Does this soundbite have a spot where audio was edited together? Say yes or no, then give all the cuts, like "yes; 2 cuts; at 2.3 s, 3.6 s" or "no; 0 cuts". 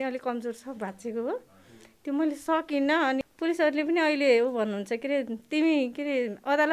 yes; 1 cut; at 3.3 s